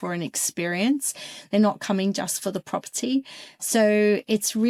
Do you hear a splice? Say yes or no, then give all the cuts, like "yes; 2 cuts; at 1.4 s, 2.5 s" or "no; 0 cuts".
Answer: no; 0 cuts